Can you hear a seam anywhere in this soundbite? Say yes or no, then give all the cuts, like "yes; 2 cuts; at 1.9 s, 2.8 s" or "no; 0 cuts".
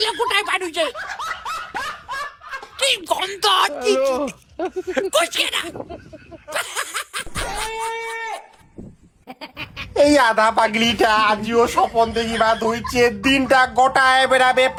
no; 0 cuts